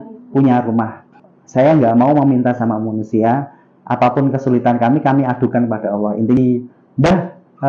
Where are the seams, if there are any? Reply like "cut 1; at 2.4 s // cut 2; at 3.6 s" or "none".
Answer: cut 1; at 1.1 s // cut 2; at 6.4 s